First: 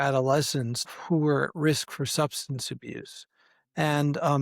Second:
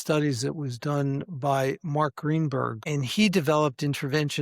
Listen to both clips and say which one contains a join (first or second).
second